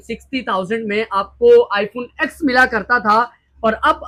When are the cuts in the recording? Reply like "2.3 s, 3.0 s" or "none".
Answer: none